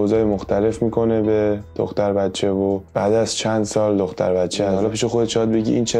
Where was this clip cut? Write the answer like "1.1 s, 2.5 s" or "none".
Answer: 4.7 s